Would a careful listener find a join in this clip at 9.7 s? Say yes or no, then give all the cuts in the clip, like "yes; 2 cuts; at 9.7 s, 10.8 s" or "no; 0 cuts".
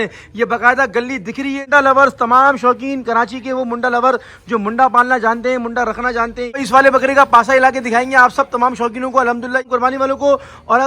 yes; 3 cuts; at 1.6 s, 6.6 s, 9.7 s